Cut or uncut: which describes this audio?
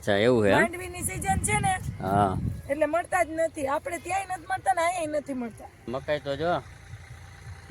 cut